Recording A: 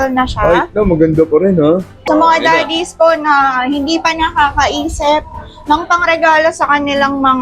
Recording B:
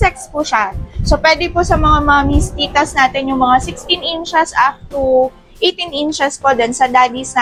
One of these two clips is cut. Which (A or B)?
A